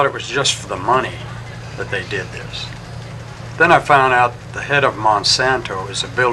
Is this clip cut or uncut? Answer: uncut